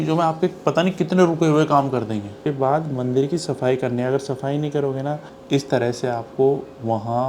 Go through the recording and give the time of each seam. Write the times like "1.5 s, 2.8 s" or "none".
2.4 s, 5.3 s